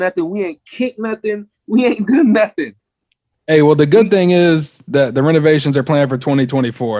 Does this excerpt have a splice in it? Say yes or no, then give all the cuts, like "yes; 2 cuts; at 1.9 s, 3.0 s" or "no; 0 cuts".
no; 0 cuts